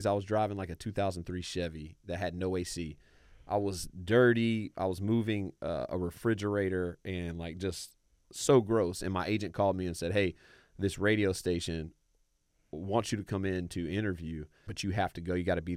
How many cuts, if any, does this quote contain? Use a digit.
1